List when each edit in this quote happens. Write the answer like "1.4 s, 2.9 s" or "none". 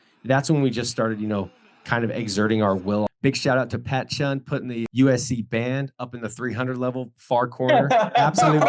3.1 s